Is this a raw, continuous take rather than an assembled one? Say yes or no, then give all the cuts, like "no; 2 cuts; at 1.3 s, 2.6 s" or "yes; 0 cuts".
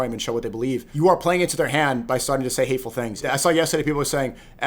no; 2 cuts; at 0.9 s, 3.2 s